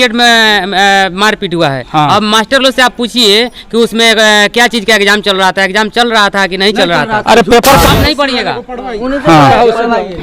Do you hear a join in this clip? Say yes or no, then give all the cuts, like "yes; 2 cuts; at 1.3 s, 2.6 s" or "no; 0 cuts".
yes; 1 cut; at 7.9 s